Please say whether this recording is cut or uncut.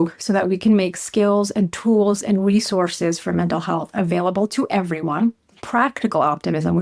cut